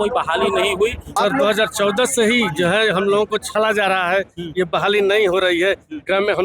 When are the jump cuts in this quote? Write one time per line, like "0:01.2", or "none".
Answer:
0:01.1